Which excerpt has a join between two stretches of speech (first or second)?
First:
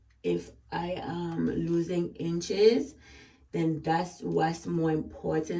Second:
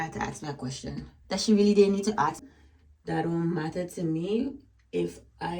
second